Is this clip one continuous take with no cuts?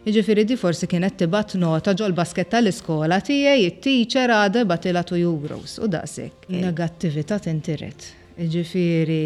no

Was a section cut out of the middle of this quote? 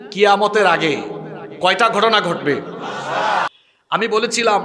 yes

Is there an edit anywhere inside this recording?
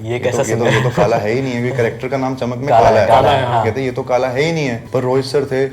yes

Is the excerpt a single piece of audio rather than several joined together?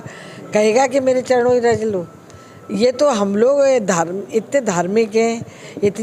yes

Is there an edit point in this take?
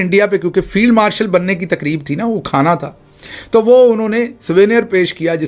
no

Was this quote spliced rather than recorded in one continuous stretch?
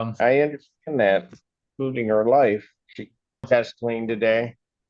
yes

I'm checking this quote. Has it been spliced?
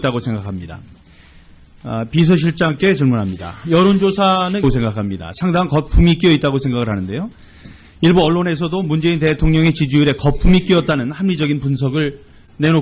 no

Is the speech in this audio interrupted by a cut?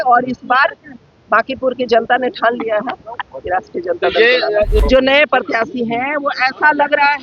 yes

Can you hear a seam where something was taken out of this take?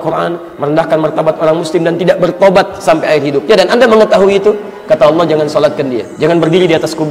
yes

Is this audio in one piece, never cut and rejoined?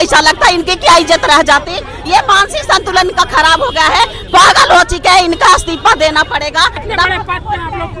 yes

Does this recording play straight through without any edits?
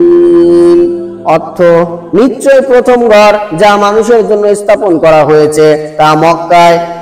yes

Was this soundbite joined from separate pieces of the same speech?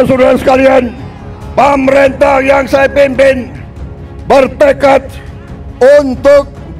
no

